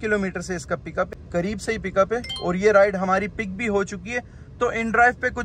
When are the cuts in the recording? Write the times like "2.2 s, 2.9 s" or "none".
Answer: 1.2 s

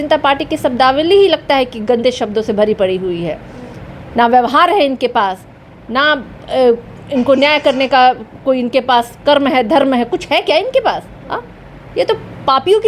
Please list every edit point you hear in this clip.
none

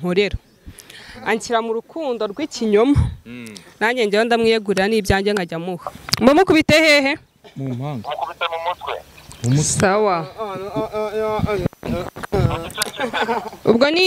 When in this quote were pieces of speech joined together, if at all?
6.0 s

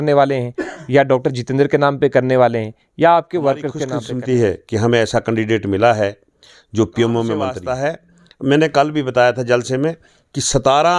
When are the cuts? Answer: 3.9 s, 7.6 s

